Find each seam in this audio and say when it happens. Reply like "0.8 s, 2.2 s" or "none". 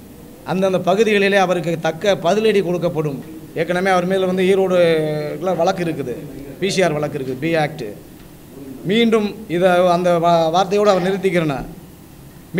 3.2 s